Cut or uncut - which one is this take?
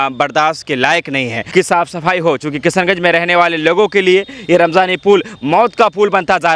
cut